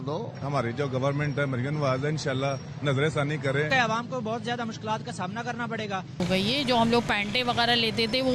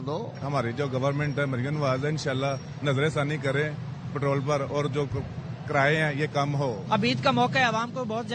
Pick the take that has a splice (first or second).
first